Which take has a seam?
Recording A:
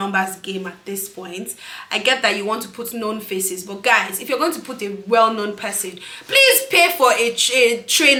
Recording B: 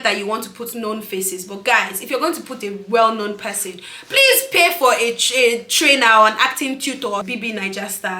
B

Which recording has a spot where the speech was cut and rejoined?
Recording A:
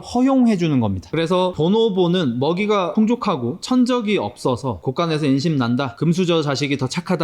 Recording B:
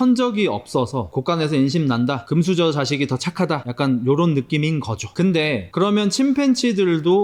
A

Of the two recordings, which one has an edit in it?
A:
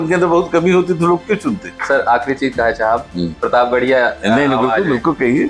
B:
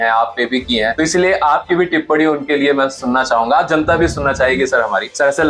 A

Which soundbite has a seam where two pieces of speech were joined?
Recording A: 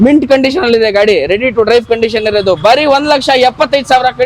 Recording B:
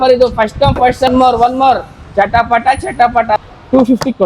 B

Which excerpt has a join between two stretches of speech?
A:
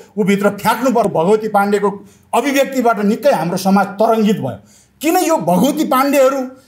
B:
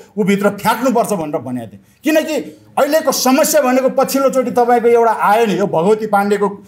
A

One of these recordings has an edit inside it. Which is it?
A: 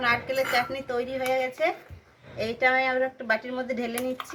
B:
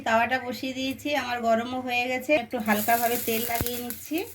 B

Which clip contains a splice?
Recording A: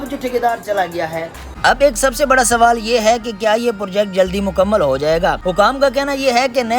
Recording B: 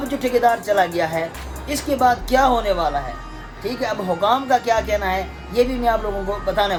A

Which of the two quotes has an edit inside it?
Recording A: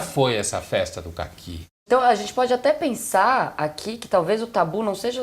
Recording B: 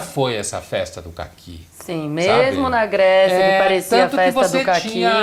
A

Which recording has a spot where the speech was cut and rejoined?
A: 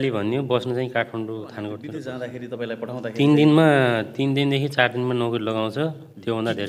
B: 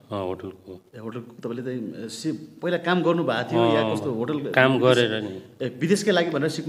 A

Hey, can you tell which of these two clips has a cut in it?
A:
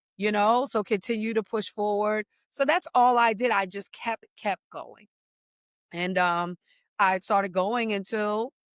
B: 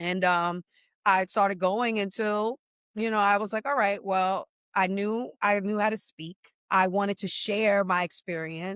B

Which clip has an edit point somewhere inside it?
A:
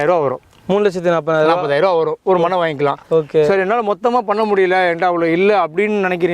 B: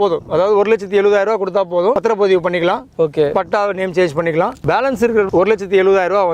B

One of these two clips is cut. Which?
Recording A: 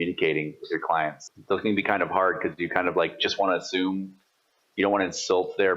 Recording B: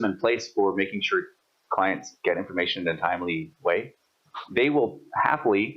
A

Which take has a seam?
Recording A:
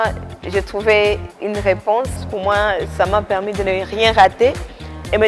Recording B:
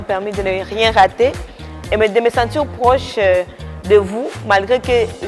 A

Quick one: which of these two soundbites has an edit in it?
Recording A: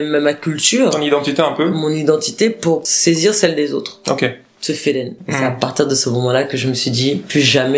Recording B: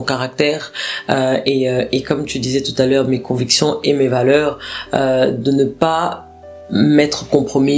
A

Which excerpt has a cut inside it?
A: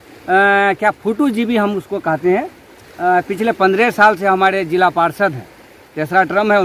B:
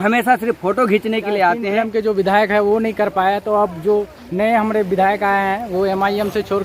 B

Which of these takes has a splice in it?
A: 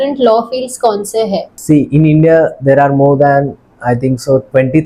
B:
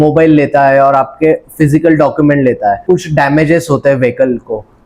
B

